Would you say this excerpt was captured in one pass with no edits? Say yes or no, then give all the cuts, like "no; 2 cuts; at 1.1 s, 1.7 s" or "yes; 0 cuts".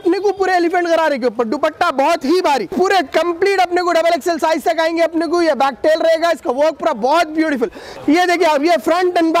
no; 2 cuts; at 2.7 s, 7.8 s